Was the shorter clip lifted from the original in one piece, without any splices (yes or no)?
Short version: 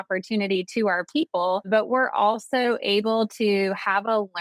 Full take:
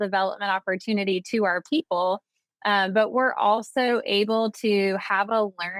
no